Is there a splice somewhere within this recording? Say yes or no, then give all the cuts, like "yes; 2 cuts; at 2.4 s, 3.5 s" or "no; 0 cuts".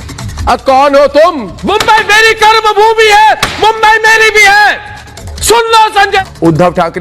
yes; 2 cuts; at 1.6 s, 6.2 s